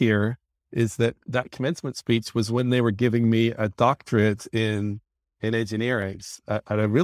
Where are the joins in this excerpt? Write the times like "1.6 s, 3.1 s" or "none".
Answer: none

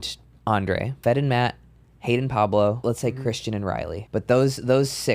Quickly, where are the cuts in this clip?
0.9 s, 2.8 s, 4.0 s

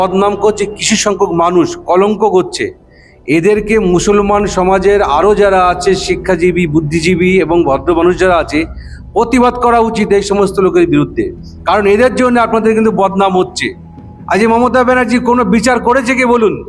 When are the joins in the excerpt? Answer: none

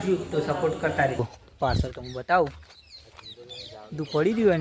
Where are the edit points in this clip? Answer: 1.2 s

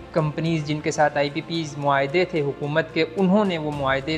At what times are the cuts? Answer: none

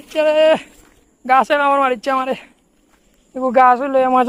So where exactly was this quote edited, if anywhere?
none

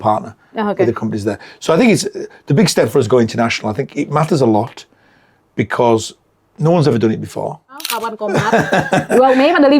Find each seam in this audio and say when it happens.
7.9 s

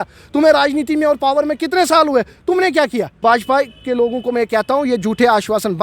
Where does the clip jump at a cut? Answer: 3.1 s

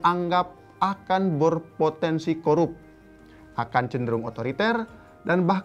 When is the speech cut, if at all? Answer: none

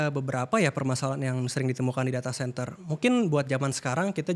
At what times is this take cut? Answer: none

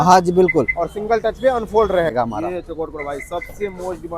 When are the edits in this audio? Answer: 2.1 s

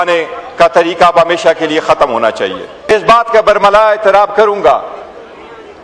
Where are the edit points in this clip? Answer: 2.9 s

